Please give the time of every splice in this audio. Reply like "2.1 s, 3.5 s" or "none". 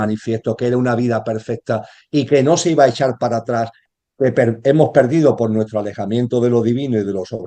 3.9 s